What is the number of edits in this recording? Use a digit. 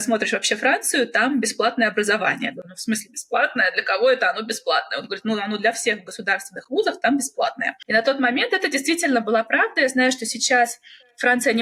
0